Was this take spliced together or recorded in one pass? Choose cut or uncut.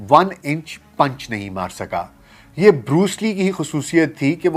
uncut